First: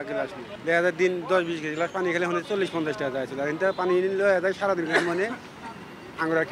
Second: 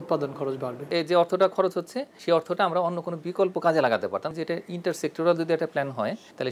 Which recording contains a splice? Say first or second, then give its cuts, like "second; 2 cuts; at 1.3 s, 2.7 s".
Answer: second; 3 cuts; at 0.8 s, 2.1 s, 4.3 s